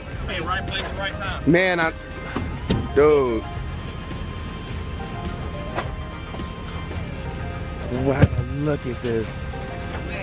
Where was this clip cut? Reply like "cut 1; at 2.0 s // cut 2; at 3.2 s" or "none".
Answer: none